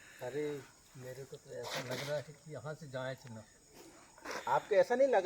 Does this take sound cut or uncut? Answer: uncut